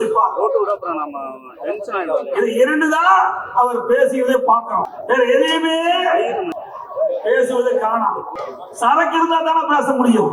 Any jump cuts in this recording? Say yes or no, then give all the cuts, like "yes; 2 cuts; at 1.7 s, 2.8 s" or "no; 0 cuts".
yes; 3 cuts; at 4.9 s, 6.5 s, 8.5 s